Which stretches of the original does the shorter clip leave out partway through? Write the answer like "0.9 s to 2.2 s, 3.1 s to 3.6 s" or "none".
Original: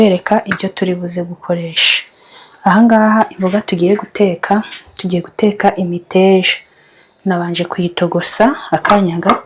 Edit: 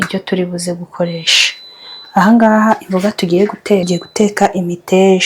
4.3 s to 5.1 s